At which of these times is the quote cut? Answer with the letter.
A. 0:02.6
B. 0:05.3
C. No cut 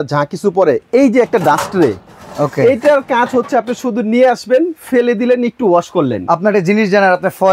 C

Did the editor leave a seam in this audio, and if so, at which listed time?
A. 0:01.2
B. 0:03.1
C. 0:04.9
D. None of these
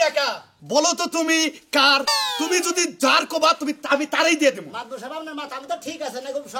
D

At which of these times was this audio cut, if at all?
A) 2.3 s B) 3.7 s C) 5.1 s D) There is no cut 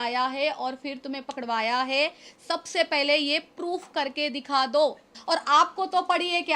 C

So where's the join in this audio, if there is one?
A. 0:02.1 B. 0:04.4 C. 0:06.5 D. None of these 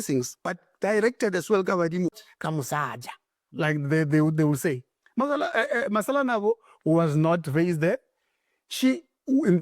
A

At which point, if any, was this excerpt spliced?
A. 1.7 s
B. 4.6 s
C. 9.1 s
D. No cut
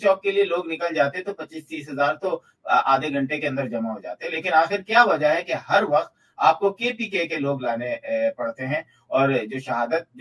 D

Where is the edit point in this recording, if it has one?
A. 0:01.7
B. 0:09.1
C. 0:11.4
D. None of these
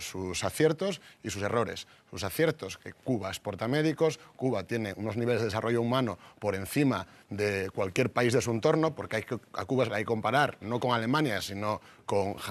B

